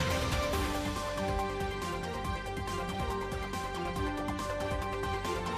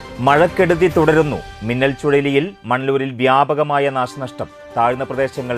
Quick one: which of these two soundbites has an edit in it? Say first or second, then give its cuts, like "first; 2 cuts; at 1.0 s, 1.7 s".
first; 1 cut; at 3.8 s